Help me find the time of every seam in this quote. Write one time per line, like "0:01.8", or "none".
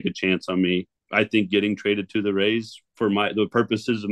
0:01.0